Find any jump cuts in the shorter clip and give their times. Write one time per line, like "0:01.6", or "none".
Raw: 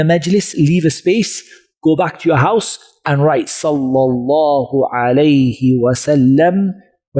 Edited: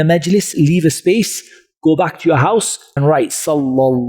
0:02.8